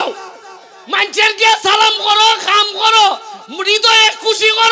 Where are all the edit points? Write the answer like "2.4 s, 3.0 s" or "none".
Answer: none